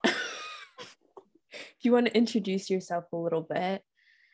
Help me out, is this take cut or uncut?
uncut